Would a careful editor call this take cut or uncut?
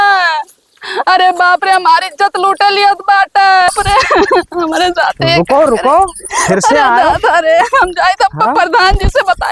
cut